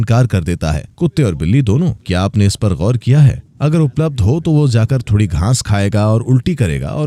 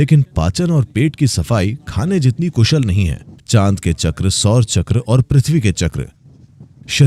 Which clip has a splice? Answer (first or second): second